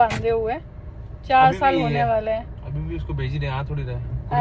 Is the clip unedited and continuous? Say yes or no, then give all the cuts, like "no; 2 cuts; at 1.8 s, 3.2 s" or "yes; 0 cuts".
yes; 0 cuts